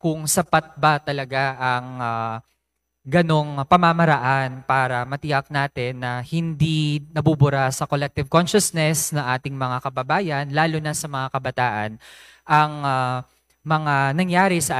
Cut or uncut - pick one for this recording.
uncut